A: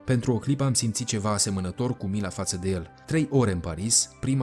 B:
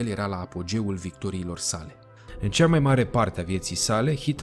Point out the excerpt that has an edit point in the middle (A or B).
B